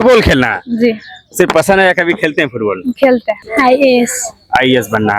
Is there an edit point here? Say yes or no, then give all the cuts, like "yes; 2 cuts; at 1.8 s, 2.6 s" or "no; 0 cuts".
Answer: yes; 1 cut; at 3.4 s